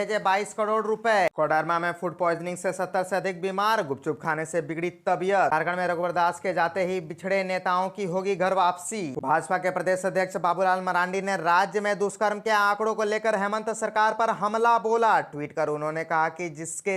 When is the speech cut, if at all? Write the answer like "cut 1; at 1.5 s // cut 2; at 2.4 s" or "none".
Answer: cut 1; at 1.3 s // cut 2; at 5.5 s // cut 3; at 9.2 s